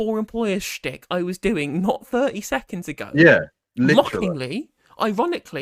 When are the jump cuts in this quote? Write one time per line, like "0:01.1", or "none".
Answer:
none